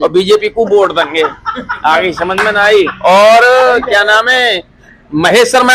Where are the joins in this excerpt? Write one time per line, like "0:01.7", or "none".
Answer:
none